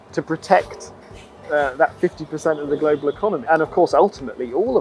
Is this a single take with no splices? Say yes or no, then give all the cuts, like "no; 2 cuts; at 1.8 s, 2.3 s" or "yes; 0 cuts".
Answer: yes; 0 cuts